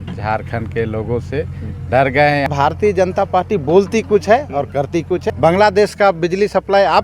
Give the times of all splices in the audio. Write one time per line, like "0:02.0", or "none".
0:02.5
0:05.3